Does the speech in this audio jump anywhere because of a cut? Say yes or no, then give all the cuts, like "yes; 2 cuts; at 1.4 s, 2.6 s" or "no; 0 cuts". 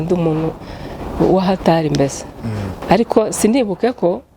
yes; 1 cut; at 2.7 s